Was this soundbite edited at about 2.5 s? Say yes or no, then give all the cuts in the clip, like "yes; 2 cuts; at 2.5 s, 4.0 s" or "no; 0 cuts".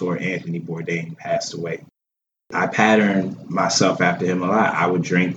yes; 1 cut; at 2.5 s